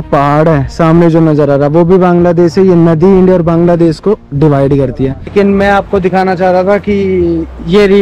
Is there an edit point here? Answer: yes; 1 cut; at 5.3 s

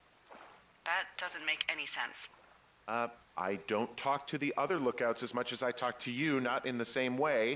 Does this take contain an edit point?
no; 0 cuts

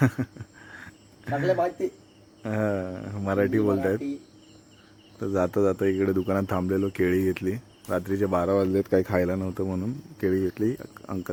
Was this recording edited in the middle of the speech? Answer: no; 0 cuts

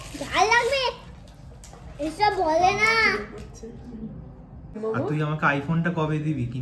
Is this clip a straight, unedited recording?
no; 1 cut; at 4.8 s

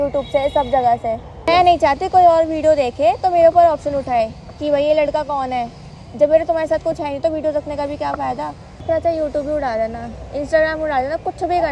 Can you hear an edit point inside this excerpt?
yes; 2 cuts; at 1.5 s, 8.7 s

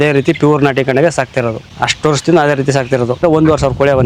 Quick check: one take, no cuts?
no; 2 cuts; at 1.7 s, 3.2 s

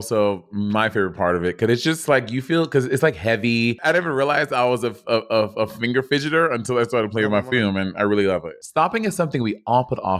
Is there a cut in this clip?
yes; 1 cut; at 3.8 s

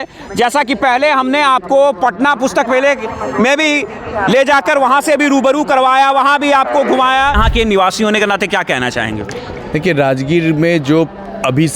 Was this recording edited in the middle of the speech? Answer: yes; 1 cut; at 7.4 s

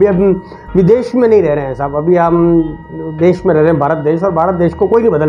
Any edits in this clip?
no; 0 cuts

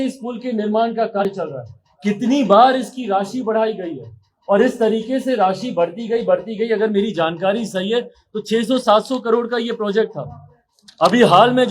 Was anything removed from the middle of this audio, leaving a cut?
yes; 1 cut; at 1.2 s

